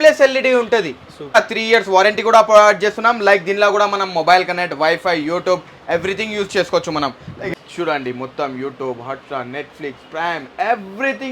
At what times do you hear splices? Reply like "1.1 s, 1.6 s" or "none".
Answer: 1.4 s, 7.5 s